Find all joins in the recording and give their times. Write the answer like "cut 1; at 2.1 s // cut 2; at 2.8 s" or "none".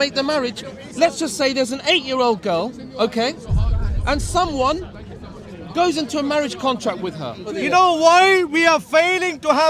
cut 1; at 7.4 s